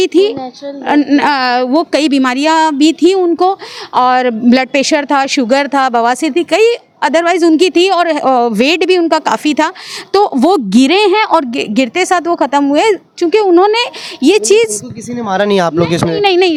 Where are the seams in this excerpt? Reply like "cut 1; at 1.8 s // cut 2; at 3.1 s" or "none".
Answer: none